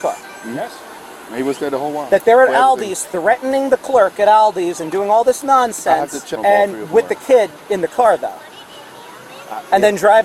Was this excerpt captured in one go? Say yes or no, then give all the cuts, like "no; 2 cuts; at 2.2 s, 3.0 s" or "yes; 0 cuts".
no; 1 cut; at 6.3 s